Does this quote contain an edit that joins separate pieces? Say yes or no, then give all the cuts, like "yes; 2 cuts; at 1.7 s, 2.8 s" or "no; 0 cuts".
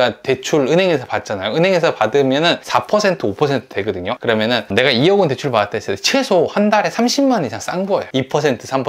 yes; 3 cuts; at 2.6 s, 4.1 s, 8.1 s